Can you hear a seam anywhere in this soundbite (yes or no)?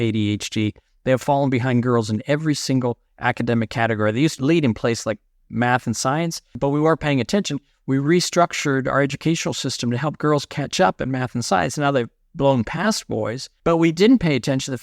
yes